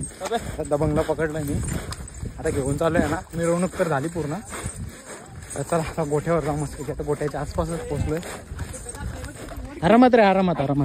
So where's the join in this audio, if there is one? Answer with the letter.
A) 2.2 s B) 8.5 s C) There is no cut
C